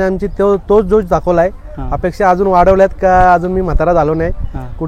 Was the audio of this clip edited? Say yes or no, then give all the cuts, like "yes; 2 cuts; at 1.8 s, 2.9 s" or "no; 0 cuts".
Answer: no; 0 cuts